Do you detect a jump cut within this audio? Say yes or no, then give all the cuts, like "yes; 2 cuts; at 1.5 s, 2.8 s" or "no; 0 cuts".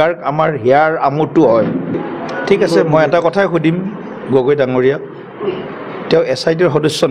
yes; 1 cut; at 1.9 s